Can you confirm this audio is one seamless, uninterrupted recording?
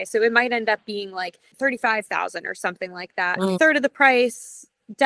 no; 2 cuts; at 1.4 s, 3.6 s

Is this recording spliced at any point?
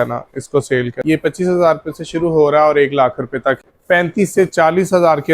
yes; 2 cuts; at 1.0 s, 3.7 s

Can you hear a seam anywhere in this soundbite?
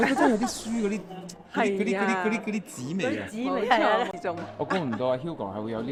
no; 0 cuts

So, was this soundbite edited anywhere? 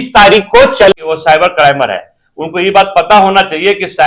yes; 1 cut; at 0.9 s

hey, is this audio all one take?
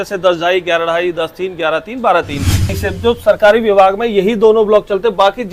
no; 1 cut; at 2.8 s

